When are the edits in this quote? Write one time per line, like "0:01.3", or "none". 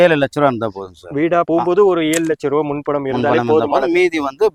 none